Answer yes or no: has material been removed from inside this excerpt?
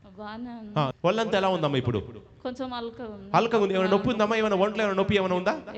yes